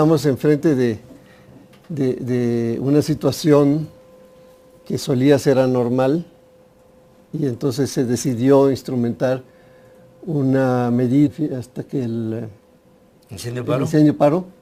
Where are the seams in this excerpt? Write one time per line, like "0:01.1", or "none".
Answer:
none